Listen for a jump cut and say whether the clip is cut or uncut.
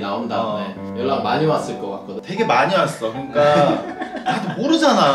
cut